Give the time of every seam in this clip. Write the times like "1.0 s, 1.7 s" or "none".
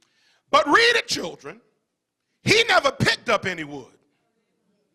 none